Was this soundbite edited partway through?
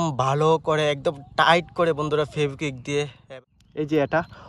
yes; 1 cut; at 3.3 s

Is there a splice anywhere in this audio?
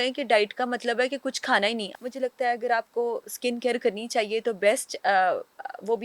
yes; 1 cut; at 1.9 s

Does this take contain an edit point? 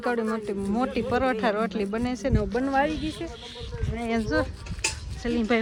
no; 0 cuts

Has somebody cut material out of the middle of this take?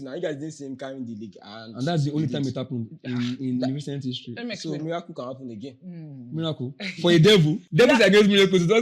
yes; 1 cut; at 7.6 s

